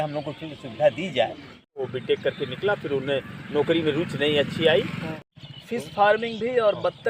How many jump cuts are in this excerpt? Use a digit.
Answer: 2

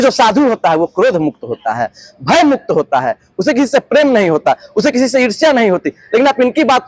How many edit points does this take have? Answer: 0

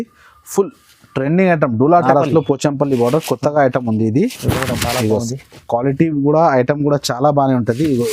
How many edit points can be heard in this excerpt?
1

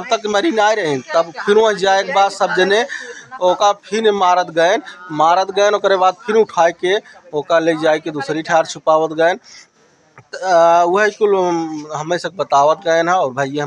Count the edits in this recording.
0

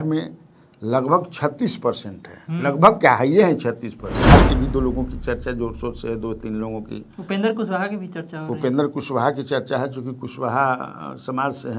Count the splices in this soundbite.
1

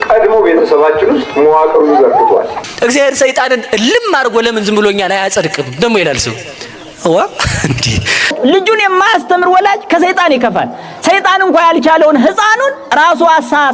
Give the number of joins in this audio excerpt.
2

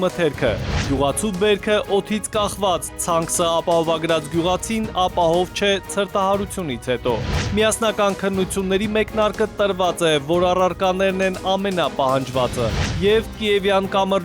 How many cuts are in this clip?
1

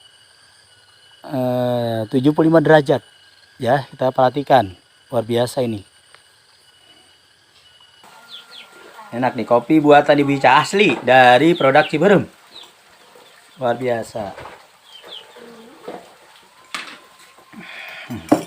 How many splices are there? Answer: 1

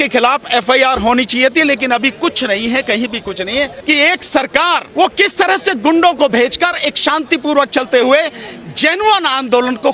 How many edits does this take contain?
2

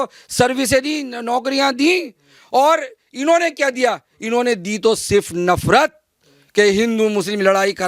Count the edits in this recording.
0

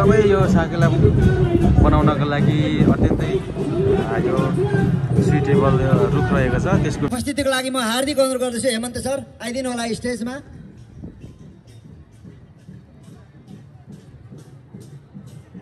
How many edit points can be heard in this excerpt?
1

